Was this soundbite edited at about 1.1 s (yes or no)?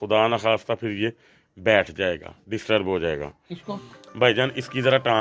no